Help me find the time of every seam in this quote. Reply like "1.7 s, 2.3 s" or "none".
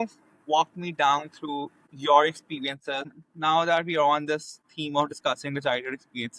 3.2 s